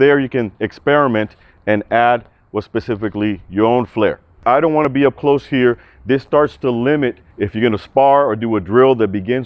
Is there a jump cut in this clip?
yes; 2 cuts; at 4.7 s, 7.3 s

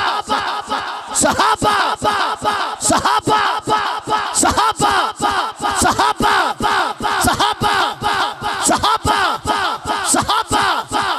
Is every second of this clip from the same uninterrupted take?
yes; 0 cuts

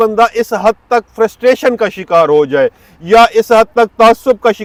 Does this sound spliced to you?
no; 0 cuts

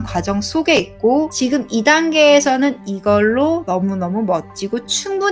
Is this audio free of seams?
yes; 0 cuts

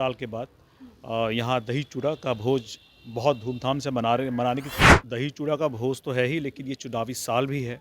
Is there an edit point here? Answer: yes; 1 cut; at 4.7 s

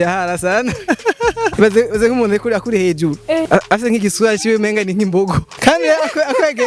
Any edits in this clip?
yes; 3 cuts; at 1.5 s, 3.5 s, 5.5 s

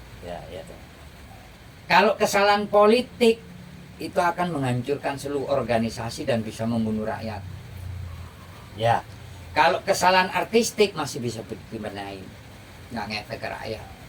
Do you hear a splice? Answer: no; 0 cuts

